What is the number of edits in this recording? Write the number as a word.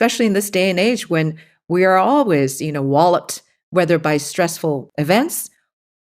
one